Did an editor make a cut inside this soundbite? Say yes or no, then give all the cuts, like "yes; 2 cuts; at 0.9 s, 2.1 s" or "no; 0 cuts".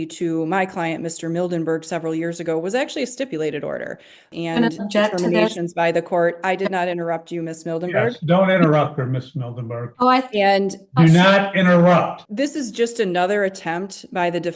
yes; 2 cuts; at 4.3 s, 12.2 s